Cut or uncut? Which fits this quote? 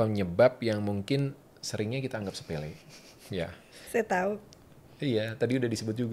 cut